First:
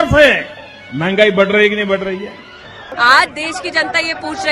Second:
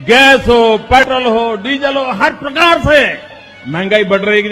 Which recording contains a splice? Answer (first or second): first